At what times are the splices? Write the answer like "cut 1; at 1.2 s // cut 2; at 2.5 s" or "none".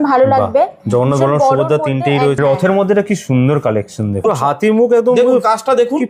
cut 1; at 2.4 s // cut 2; at 4.2 s